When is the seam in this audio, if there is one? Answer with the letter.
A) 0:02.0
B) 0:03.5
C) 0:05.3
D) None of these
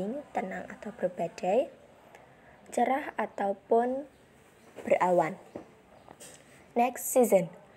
D